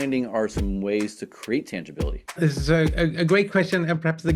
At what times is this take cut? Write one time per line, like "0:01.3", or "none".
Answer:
0:02.2